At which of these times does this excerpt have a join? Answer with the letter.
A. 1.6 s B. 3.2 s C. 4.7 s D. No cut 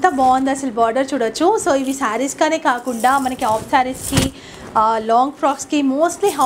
D